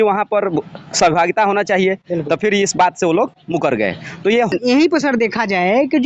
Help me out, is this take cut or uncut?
cut